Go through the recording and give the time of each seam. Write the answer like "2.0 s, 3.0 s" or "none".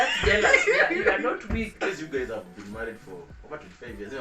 1.7 s